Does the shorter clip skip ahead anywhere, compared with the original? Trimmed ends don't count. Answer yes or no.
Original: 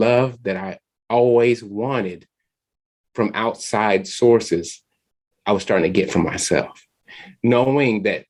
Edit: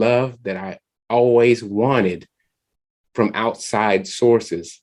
no